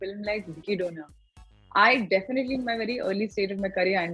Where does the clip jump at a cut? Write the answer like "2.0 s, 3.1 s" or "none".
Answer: none